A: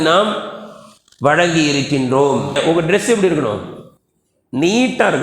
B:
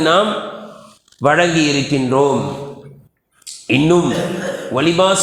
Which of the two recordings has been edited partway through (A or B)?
A